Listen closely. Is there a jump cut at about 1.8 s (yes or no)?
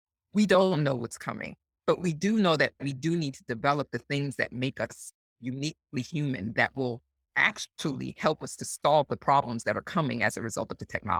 no